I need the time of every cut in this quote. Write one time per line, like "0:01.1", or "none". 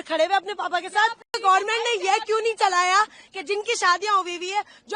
0:01.4